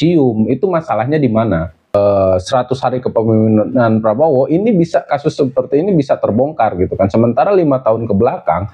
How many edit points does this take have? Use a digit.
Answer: 1